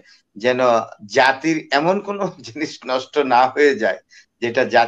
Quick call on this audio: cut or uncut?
uncut